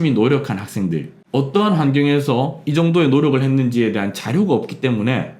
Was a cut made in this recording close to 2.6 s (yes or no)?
no